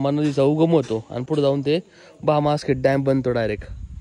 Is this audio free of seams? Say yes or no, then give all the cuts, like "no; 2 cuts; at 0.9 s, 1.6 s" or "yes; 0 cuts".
yes; 0 cuts